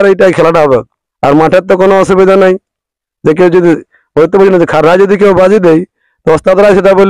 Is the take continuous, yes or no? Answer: yes